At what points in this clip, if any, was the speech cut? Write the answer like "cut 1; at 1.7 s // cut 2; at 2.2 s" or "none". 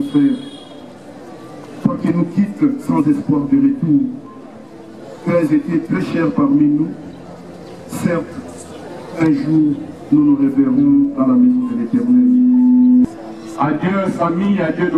cut 1; at 13.0 s